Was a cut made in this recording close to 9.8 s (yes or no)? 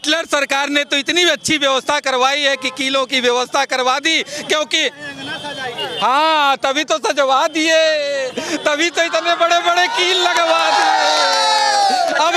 no